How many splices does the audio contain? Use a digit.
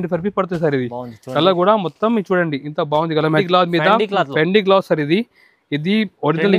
1